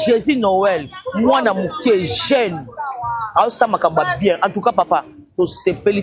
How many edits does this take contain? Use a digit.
0